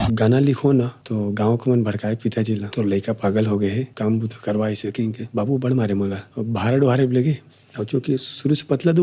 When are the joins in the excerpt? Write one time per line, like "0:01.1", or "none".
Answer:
0:01.0
0:02.7
0:03.9
0:05.2
0:06.3